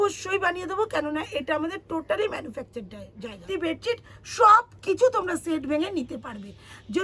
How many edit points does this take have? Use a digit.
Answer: 1